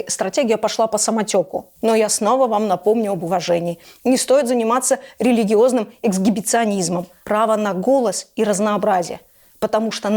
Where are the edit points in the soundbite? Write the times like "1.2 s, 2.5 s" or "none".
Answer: 1.7 s, 7.1 s